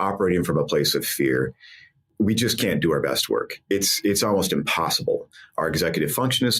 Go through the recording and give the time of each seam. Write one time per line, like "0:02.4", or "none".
0:02.1